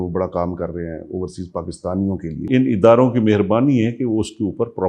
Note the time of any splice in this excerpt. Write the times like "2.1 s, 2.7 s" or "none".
2.5 s